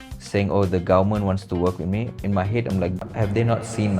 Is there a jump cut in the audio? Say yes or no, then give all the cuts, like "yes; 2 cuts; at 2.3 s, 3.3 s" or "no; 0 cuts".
yes; 1 cut; at 3.0 s